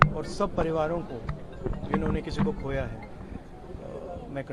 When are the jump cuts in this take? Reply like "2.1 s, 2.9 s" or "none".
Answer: none